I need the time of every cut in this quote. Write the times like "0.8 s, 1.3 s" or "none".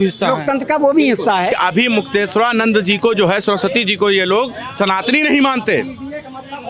1.5 s